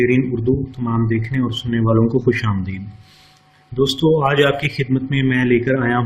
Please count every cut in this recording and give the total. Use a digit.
0